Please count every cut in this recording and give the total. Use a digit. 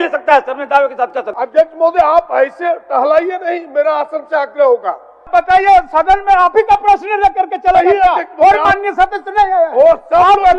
2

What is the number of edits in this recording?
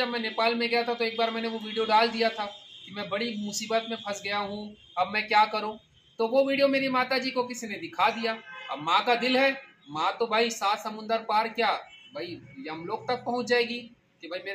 0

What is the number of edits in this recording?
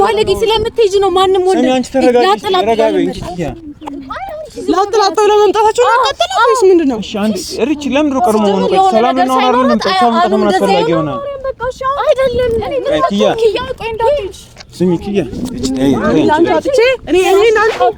0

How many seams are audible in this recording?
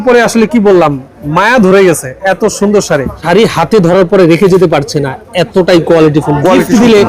1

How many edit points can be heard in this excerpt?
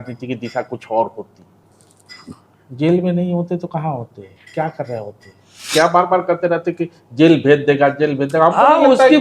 1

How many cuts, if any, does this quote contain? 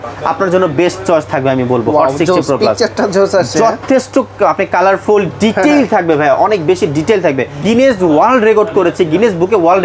1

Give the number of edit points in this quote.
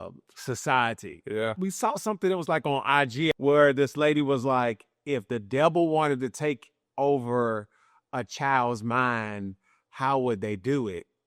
2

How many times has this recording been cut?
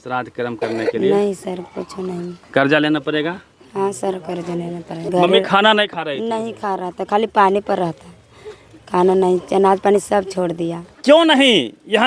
2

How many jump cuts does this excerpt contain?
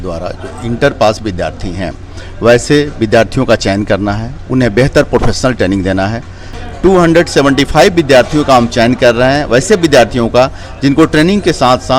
1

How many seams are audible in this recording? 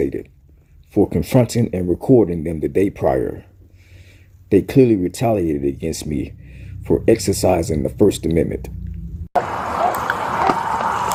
0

